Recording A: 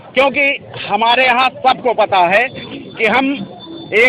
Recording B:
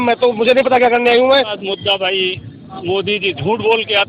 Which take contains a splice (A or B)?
B